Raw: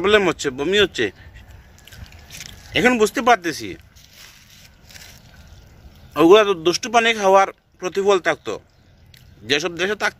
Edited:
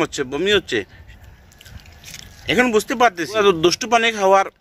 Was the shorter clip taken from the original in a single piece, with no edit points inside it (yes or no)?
no